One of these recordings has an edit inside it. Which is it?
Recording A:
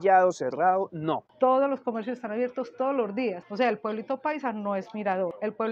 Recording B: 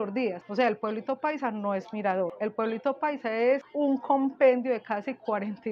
A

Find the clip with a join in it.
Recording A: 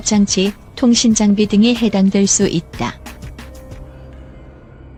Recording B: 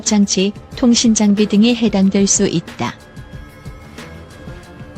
B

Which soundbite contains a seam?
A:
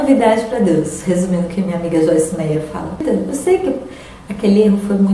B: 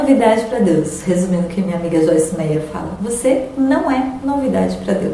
A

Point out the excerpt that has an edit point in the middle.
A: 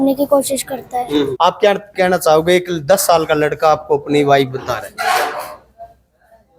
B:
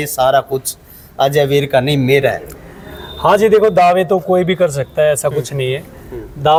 A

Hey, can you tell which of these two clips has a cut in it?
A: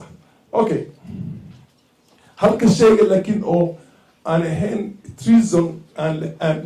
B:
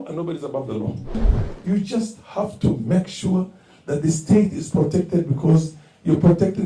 B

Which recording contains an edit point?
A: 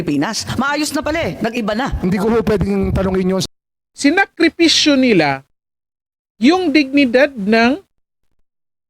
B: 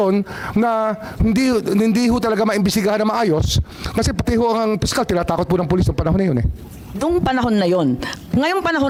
A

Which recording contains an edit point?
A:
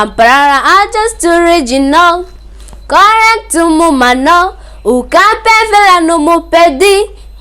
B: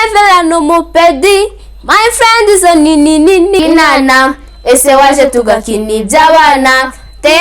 B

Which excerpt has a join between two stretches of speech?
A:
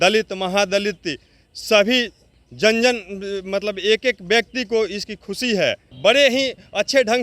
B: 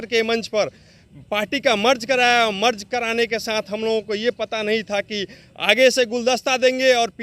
A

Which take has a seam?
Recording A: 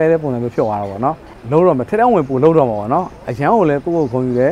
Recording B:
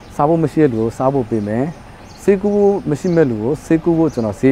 A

